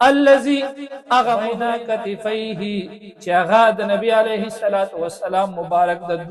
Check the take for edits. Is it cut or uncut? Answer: cut